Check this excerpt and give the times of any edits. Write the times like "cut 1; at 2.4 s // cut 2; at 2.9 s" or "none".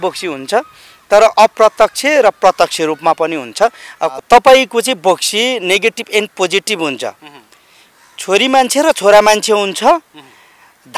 cut 1; at 4.1 s